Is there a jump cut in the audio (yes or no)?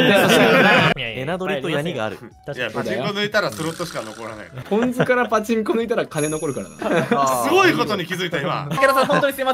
yes